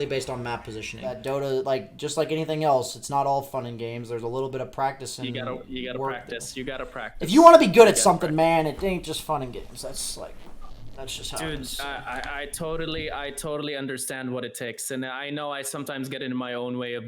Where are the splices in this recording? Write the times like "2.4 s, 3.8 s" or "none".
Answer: 1.2 s